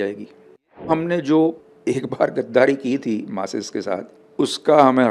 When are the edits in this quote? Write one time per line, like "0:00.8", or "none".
0:00.9
0:01.7
0:04.2